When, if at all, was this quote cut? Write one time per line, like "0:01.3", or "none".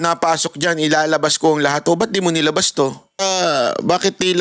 0:03.1

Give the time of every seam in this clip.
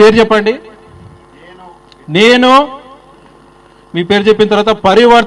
none

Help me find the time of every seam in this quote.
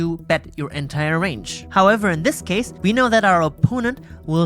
0:01.6
0:02.7

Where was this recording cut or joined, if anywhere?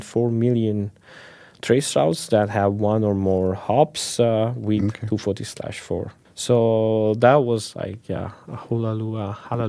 0:06.2

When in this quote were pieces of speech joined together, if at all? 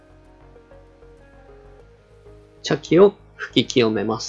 0:02.6

